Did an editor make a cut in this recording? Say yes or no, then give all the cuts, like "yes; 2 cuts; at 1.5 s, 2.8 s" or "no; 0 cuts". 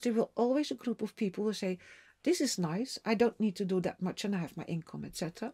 no; 0 cuts